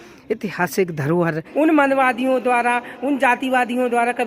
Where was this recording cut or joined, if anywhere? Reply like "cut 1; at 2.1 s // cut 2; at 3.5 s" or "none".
cut 1; at 1.4 s